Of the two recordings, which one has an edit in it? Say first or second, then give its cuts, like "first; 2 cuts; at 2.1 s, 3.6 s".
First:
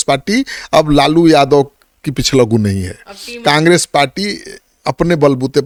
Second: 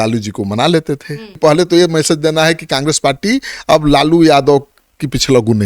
second; 1 cut; at 1.4 s